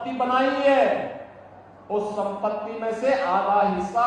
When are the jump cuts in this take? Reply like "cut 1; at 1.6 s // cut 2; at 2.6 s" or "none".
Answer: none